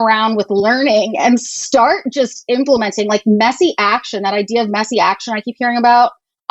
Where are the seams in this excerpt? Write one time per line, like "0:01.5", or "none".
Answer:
none